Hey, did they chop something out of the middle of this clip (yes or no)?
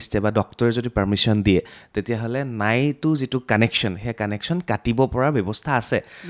no